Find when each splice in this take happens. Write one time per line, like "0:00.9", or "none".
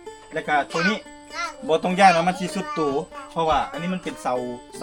none